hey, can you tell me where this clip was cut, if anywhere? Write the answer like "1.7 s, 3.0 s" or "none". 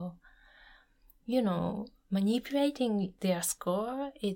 3.1 s